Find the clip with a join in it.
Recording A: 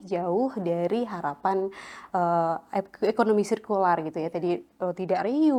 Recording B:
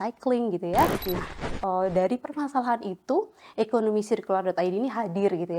B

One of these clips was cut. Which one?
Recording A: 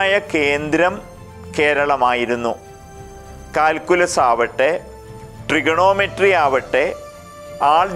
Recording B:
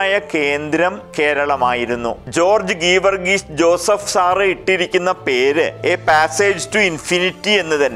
B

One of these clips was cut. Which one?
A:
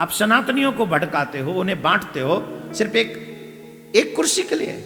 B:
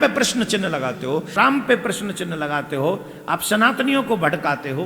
B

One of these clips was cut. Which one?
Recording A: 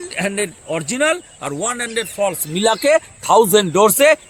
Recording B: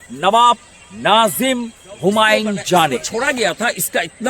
B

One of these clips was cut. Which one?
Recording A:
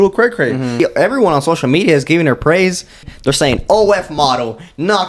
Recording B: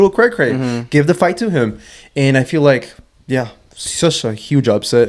A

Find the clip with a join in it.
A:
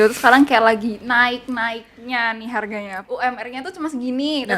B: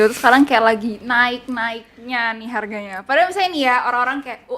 A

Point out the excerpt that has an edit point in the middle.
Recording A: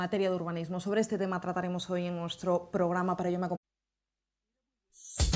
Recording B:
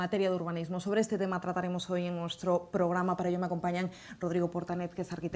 B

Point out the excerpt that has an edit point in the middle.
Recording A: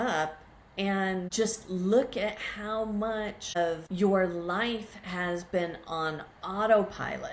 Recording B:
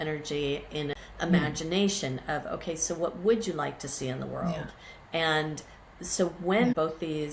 B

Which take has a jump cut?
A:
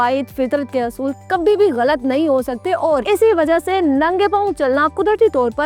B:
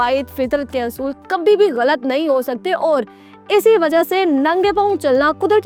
A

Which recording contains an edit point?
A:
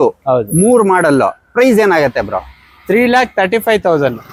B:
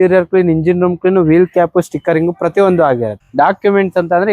B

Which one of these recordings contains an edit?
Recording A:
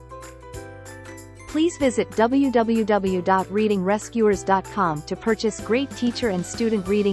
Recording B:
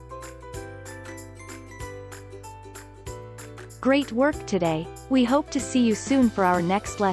A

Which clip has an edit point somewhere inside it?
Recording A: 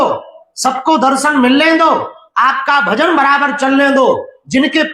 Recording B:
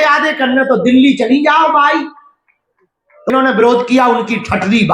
B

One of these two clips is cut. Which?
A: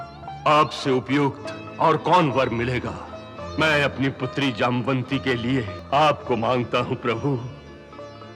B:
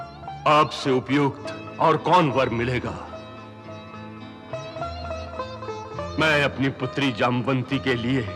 A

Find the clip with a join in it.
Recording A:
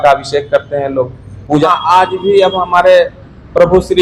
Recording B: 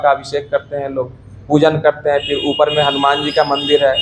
A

